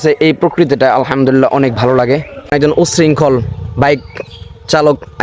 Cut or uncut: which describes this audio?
cut